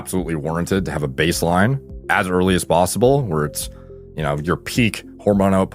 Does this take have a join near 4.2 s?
no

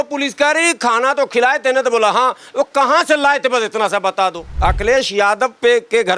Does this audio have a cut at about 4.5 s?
yes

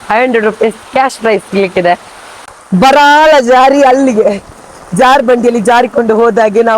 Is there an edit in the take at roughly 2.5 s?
yes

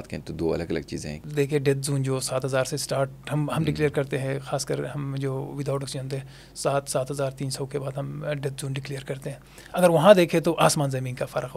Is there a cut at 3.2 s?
no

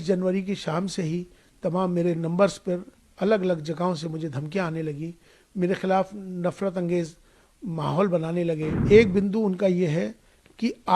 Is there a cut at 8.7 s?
yes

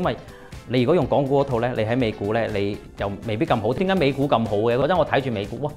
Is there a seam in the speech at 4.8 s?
yes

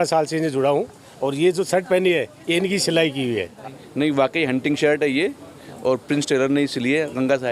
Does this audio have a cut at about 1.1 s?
no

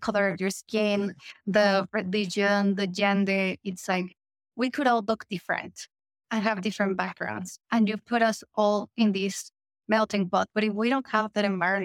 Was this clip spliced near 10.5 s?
yes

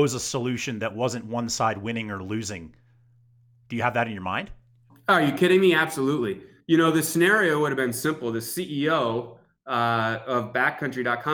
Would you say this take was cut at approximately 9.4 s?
no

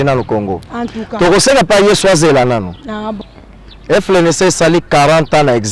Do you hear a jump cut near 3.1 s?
yes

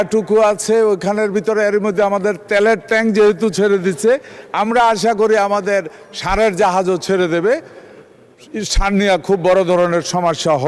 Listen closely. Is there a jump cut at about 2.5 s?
no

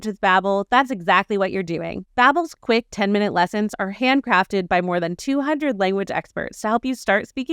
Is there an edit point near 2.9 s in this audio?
no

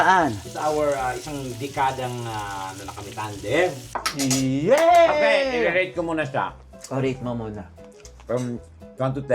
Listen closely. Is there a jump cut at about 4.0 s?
yes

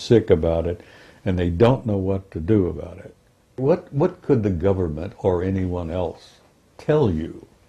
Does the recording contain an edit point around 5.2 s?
no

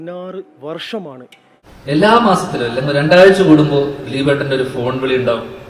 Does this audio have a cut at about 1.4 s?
yes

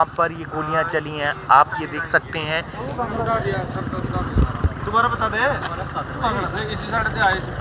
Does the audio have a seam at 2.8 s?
yes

